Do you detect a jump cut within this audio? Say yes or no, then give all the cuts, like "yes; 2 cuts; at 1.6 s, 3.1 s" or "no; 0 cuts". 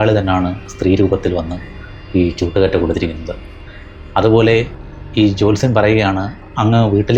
no; 0 cuts